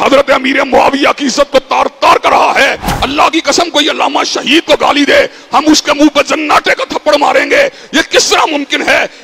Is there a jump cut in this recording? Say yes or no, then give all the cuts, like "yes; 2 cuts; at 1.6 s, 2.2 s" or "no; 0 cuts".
yes; 1 cut; at 2.8 s